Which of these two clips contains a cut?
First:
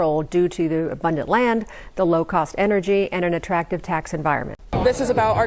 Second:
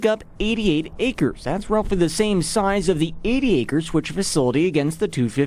first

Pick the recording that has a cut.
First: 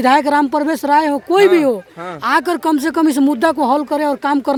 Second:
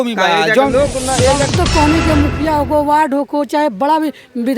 second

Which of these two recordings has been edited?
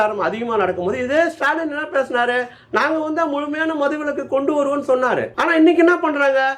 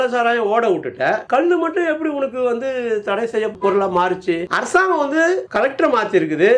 second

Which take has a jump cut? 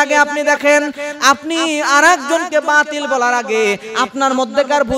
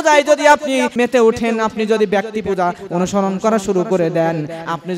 second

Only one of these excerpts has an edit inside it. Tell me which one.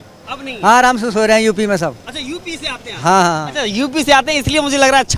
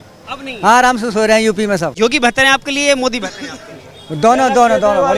second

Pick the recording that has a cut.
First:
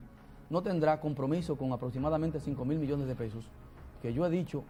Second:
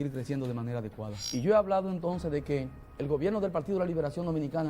second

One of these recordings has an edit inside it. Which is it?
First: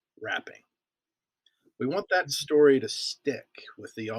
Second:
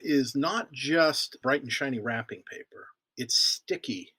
second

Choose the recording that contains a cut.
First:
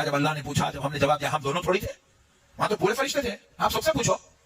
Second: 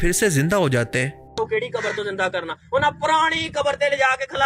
second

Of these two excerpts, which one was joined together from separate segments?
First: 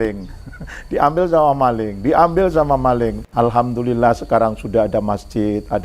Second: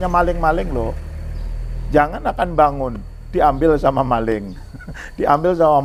first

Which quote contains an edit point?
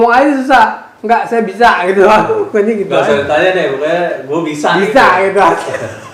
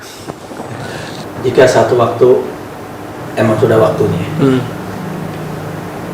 second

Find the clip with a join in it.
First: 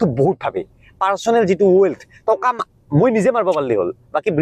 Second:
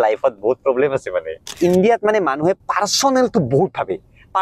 second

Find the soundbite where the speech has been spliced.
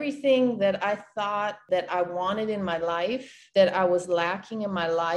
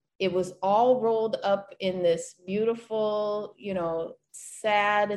first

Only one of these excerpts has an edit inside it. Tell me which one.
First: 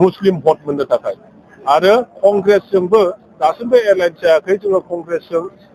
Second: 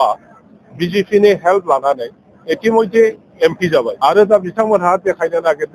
second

